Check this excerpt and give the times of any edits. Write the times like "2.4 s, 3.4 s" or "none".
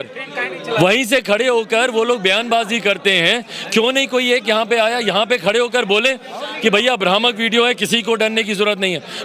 none